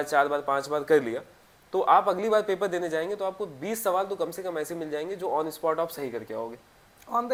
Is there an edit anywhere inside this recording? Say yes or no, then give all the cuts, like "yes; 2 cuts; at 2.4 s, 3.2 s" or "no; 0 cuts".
no; 0 cuts